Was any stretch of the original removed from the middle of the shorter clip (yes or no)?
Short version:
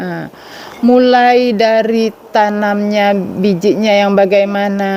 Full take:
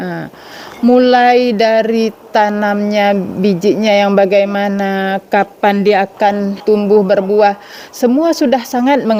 no